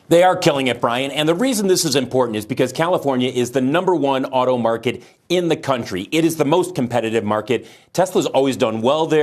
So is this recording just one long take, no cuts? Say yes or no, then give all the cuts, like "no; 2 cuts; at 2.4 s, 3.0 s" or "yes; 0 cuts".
yes; 0 cuts